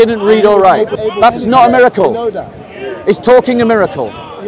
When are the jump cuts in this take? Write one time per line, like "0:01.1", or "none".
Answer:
0:01.0